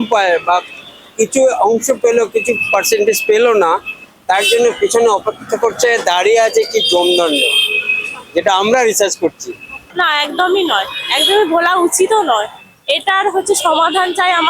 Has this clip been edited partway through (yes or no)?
yes